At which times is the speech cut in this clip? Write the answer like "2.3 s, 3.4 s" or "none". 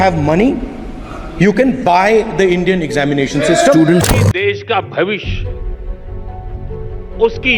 4.0 s

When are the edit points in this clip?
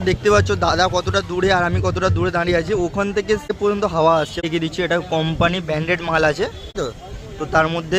3.6 s, 4.5 s, 6.8 s

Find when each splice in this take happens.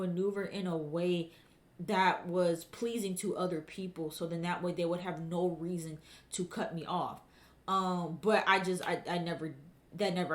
none

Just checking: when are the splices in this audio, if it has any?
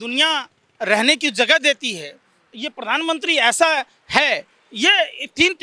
none

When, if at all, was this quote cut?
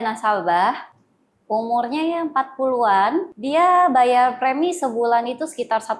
3.3 s

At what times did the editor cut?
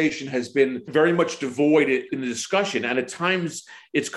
0.8 s, 2.1 s

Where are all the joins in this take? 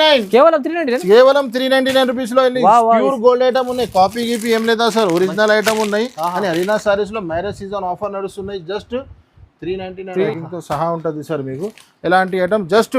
10.3 s

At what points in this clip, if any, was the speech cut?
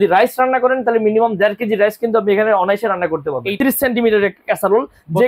3.5 s

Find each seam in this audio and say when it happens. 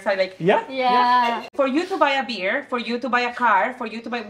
1.4 s

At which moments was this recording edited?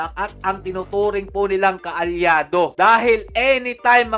none

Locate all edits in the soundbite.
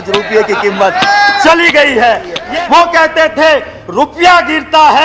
2.4 s

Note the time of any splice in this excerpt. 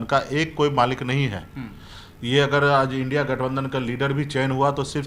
none

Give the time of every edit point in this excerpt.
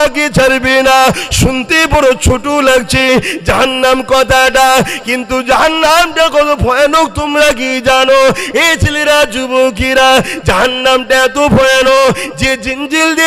none

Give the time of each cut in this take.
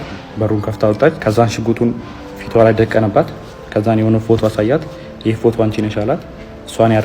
1.2 s

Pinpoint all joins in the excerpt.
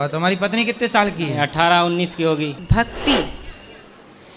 2.6 s

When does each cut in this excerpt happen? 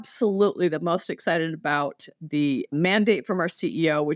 none

